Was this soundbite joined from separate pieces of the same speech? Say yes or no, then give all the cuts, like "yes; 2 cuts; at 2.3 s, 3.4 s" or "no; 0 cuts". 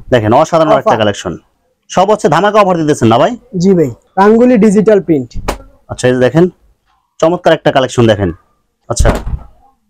yes; 2 cuts; at 4.0 s, 8.8 s